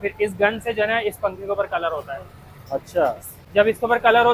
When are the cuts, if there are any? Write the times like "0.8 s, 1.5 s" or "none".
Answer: none